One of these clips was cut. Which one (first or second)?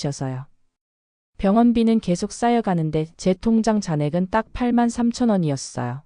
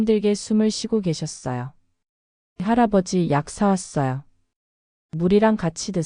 first